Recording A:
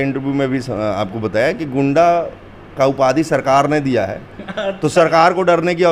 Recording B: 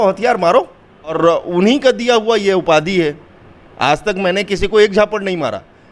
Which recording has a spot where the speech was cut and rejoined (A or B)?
B